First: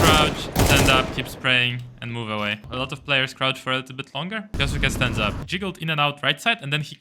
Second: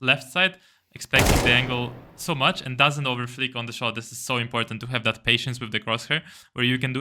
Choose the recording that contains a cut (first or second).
first